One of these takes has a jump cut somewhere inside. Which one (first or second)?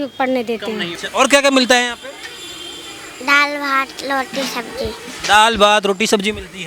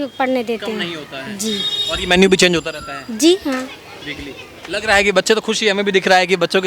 first